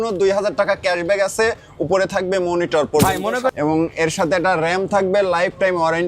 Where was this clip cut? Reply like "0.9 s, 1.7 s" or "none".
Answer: 3.5 s